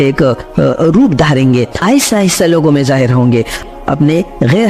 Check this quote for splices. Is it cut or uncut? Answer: cut